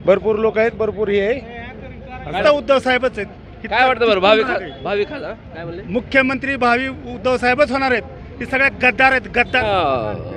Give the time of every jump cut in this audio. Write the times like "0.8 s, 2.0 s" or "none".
2.4 s, 9.6 s